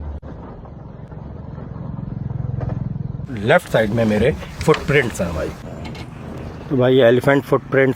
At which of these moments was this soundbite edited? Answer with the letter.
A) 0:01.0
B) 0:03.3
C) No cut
B